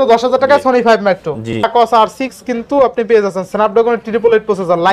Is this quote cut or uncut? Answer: cut